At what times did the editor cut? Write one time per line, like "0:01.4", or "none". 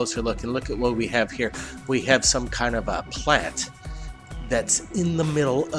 0:02.3